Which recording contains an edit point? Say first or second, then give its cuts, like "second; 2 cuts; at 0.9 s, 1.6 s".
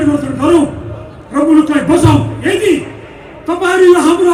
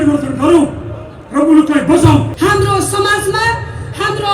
second; 1 cut; at 2.3 s